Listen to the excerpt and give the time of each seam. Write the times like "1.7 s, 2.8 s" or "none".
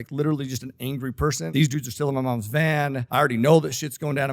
1.4 s, 3.0 s